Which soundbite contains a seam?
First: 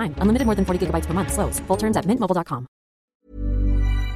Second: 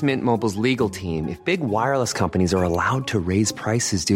first; 1 cut; at 3.1 s

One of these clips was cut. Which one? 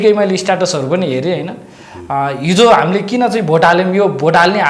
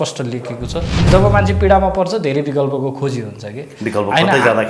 second; 1 cut; at 1.1 s

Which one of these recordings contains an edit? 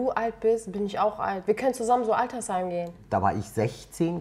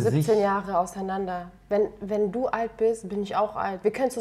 first; 1 cut; at 2.9 s

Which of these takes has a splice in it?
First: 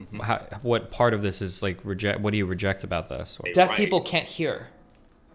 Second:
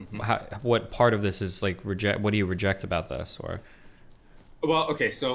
first; 1 cut; at 3.4 s

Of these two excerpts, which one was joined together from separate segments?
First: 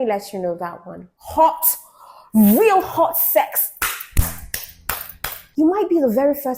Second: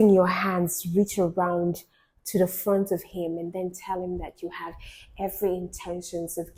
first; 2 cuts; at 1.1 s, 5.4 s

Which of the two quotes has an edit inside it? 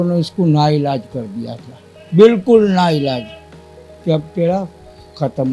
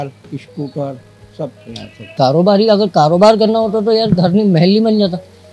second; 1 cut; at 2.1 s

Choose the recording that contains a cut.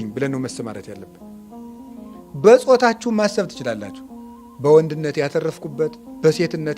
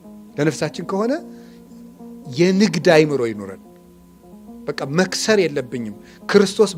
first; 2 cuts; at 1.0 s, 2.3 s

